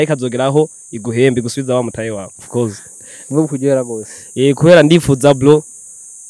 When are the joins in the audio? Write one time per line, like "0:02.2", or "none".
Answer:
0:02.4